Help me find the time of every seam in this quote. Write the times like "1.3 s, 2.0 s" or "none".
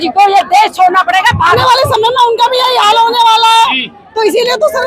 1.6 s